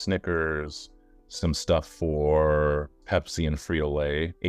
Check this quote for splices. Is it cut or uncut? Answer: cut